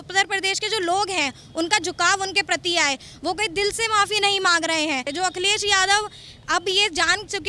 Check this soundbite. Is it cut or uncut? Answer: cut